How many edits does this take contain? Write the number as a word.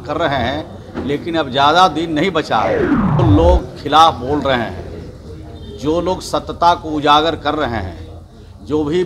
one